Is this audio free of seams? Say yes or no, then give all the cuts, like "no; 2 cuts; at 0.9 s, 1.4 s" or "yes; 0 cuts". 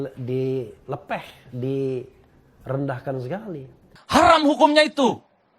no; 1 cut; at 3.9 s